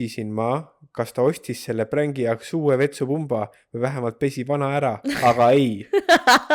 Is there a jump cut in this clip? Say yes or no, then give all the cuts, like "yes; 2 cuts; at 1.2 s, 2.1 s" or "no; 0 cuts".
no; 0 cuts